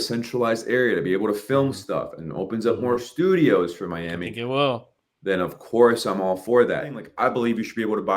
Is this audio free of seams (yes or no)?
no